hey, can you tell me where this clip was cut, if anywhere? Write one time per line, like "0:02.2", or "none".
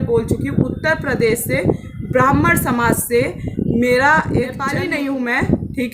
0:04.7